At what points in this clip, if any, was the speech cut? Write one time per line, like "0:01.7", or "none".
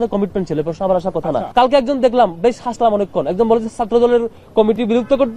0:01.5